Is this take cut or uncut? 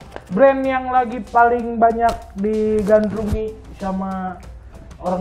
uncut